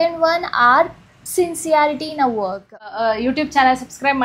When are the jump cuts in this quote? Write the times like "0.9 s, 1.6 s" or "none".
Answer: 2.9 s